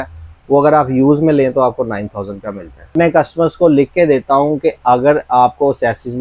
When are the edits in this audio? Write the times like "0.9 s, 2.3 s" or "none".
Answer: 2.9 s

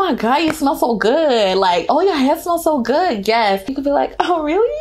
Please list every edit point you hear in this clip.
1.9 s

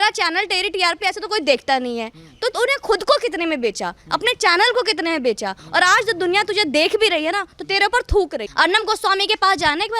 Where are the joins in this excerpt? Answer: 8.4 s

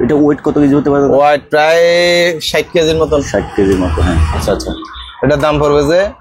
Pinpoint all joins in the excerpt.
4.3 s

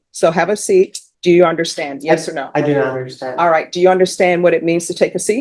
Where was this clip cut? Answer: 1.1 s

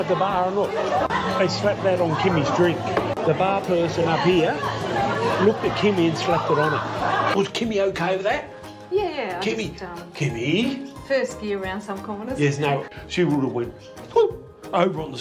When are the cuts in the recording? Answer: 1.1 s, 7.3 s, 12.9 s

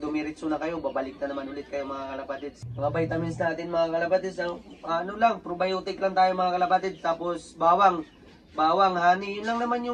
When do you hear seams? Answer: 2.7 s

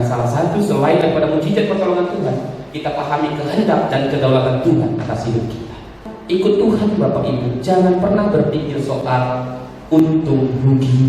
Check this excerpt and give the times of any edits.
6.1 s

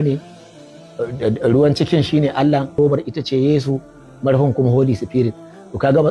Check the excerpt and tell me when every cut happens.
2.7 s

